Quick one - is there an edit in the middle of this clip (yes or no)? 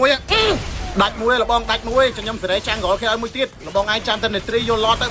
no